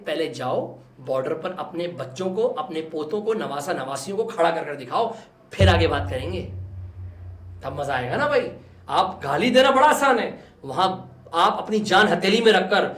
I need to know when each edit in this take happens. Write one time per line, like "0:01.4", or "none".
none